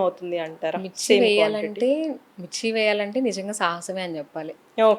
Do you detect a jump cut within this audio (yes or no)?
no